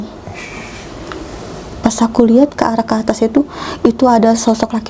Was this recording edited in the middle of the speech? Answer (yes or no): no